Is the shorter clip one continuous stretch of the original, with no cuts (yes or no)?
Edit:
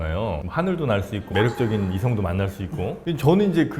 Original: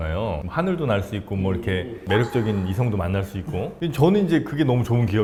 no